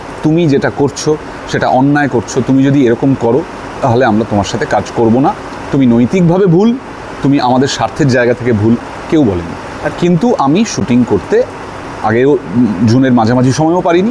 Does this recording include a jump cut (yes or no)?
no